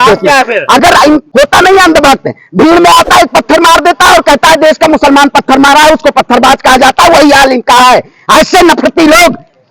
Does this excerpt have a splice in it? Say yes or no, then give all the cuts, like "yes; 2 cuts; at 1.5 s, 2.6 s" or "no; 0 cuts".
yes; 1 cut; at 1.3 s